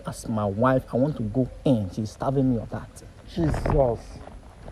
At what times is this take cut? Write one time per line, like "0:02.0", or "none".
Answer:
none